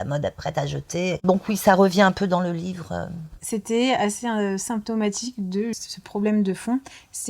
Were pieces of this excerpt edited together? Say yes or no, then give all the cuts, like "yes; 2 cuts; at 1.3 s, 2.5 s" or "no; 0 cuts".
yes; 3 cuts; at 1.2 s, 3.3 s, 5.8 s